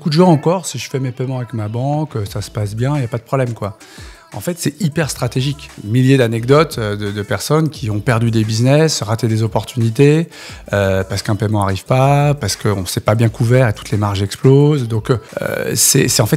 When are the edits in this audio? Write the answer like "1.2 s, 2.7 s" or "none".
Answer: 5.7 s, 12.4 s, 15.3 s